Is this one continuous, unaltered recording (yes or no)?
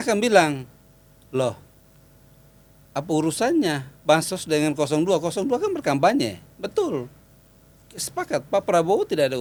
yes